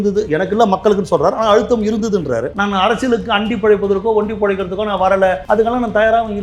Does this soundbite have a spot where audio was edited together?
yes; 2 cuts; at 2.5 s, 5.4 s

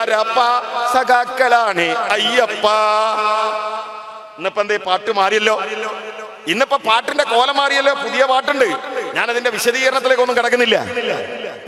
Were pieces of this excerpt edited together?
no; 0 cuts

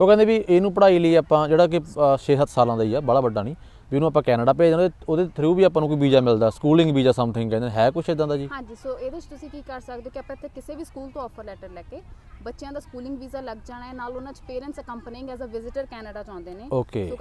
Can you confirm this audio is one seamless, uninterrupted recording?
yes; 0 cuts

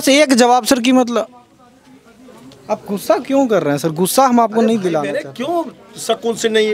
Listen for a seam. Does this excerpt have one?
no; 0 cuts

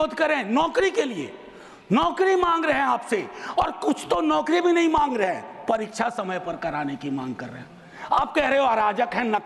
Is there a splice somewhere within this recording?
no; 0 cuts

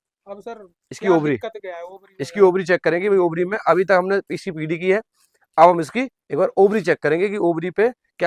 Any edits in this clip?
no; 0 cuts

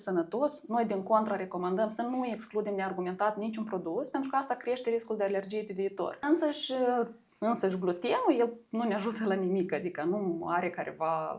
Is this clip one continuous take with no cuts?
no; 1 cut; at 6.2 s

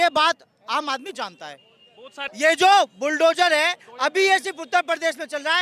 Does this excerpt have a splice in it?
yes; 1 cut; at 2.3 s

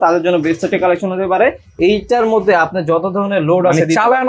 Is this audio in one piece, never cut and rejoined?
yes; 0 cuts

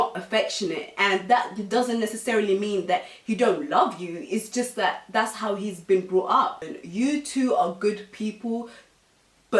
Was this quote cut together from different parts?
yes; 1 cut; at 6.8 s

